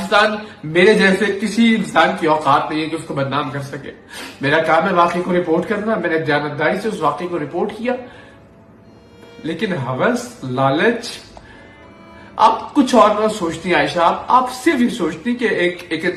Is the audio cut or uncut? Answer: uncut